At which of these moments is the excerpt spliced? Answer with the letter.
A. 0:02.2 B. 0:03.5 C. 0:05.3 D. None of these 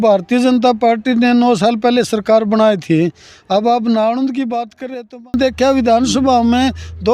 C